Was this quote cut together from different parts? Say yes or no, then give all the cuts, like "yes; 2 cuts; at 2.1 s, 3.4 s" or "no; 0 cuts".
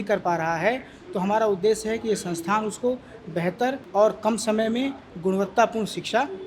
yes; 1 cut; at 3.8 s